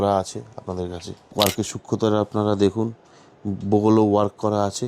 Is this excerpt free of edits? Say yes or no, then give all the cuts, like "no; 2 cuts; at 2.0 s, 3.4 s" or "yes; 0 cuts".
no; 1 cut; at 1.2 s